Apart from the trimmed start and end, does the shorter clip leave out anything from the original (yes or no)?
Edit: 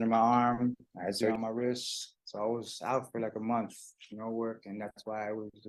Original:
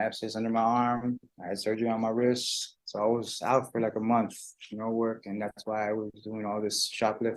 yes